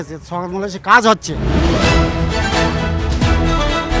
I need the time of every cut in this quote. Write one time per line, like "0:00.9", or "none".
0:01.3